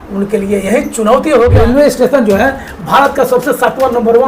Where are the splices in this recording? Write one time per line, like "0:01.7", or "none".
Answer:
0:01.5